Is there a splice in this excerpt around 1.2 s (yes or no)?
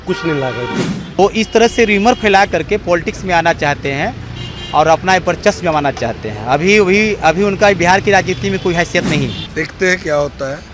yes